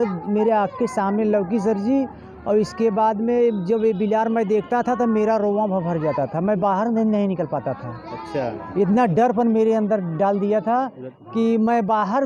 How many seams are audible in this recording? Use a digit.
0